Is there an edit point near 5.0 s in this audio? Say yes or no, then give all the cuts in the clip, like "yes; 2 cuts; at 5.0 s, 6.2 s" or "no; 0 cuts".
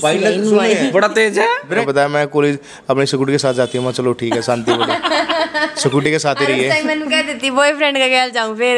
no; 1 cut; at 1.8 s